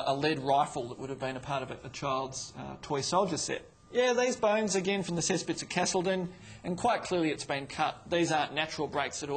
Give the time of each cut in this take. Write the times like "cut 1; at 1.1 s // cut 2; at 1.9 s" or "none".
cut 1; at 3.7 s